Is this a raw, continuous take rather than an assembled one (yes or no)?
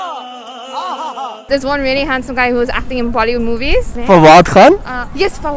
no